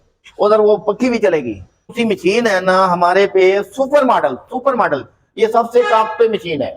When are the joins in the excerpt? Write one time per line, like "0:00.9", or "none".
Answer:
0:01.9